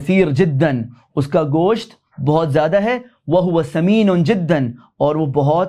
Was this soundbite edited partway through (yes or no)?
no